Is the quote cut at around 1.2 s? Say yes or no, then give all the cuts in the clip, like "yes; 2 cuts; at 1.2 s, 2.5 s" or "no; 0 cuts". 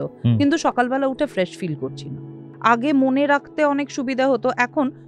no; 1 cut; at 2.5 s